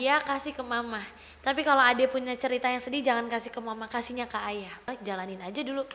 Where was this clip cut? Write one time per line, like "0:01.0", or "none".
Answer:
0:04.9